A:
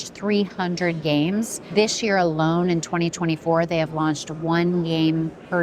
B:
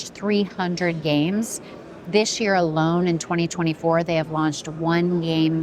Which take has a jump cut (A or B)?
A